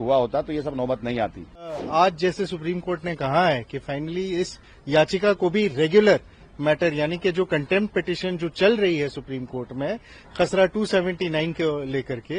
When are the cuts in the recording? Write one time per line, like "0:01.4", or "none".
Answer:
0:01.8